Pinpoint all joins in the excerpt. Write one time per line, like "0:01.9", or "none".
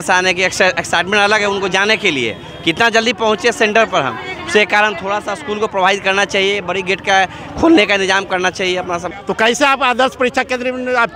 0:09.1